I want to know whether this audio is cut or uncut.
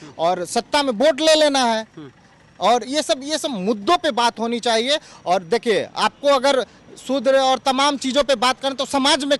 uncut